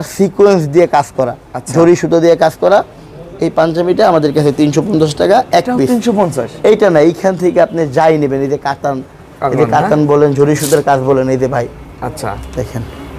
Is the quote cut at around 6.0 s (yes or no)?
no